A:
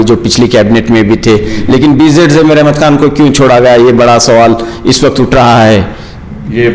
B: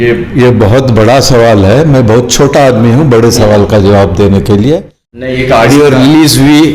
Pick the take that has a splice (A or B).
B